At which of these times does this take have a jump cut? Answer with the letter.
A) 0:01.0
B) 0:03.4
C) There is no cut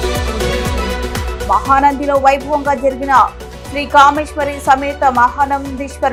C